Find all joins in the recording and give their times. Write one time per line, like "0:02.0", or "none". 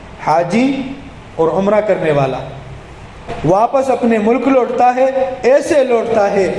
0:03.1